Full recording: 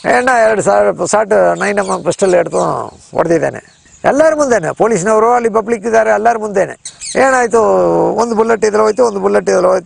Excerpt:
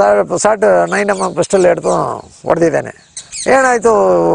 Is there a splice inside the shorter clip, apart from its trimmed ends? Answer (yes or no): yes